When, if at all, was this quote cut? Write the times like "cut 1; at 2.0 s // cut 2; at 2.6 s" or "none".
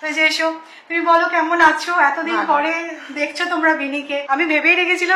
cut 1; at 4.2 s